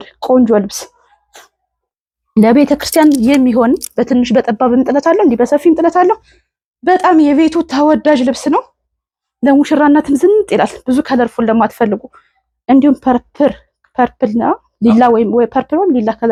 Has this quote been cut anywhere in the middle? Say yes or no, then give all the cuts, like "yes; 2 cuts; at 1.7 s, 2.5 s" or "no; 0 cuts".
no; 0 cuts